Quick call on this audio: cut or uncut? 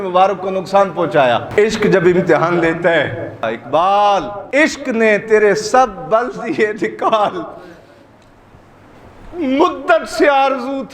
cut